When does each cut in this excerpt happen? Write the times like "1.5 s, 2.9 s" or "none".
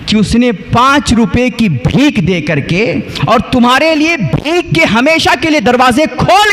none